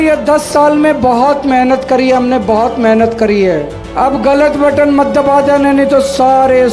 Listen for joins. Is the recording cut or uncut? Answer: uncut